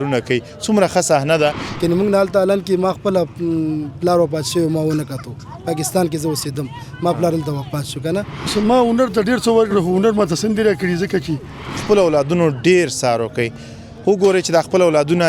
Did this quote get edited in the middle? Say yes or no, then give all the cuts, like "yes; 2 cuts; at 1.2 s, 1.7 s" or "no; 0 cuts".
yes; 3 cuts; at 1.6 s, 8.5 s, 11.8 s